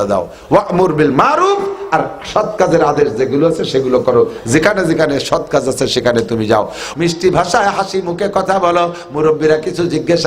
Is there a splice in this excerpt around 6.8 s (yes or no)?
yes